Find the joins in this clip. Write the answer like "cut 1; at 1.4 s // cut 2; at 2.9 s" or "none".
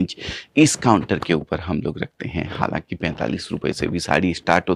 none